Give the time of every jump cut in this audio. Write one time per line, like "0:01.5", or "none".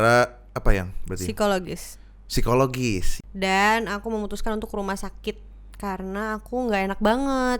0:03.2